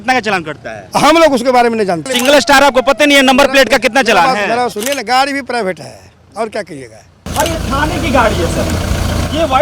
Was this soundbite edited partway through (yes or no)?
yes